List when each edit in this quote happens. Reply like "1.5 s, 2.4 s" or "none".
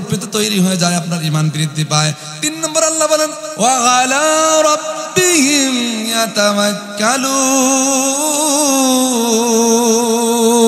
3.4 s